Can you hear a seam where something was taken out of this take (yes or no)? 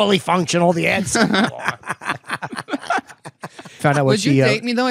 yes